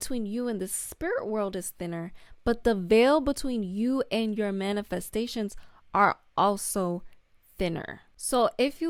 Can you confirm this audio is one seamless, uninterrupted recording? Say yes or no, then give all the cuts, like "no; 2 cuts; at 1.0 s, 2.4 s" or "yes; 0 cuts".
yes; 0 cuts